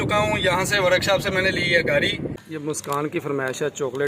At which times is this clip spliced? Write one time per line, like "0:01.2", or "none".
0:02.3